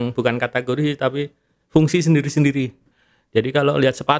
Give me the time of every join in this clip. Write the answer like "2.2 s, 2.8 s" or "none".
2.9 s